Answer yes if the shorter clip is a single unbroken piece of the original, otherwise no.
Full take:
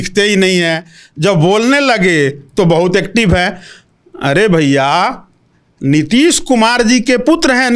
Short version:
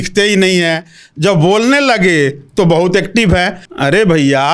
no